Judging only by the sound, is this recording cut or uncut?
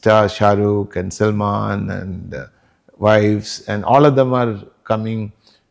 uncut